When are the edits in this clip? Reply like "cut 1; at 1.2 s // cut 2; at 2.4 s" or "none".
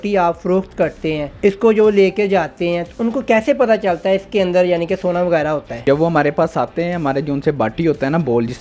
cut 1; at 1.3 s // cut 2; at 5.7 s